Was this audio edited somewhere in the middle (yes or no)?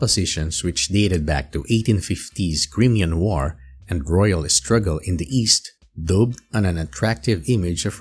no